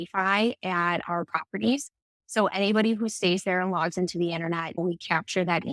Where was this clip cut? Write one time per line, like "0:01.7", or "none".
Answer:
0:04.8